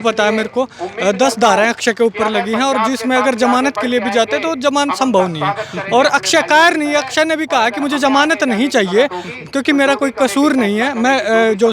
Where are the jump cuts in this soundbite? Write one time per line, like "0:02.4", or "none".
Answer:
none

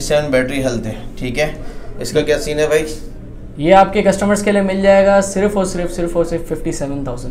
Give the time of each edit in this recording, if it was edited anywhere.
none

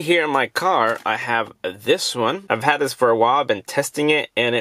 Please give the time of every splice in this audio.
none

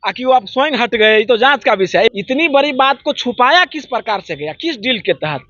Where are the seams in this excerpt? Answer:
0:02.1

